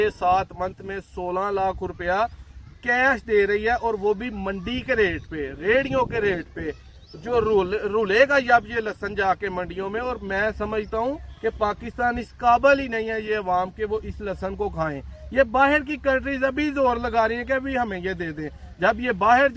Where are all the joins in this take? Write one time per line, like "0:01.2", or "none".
none